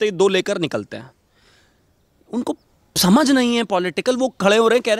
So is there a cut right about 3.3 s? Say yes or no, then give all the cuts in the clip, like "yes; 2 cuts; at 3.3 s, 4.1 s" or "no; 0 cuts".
no; 0 cuts